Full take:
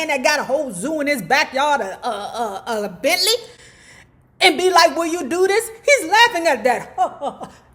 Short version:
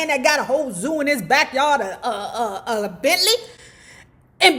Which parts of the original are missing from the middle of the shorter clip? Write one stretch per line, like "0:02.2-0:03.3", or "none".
none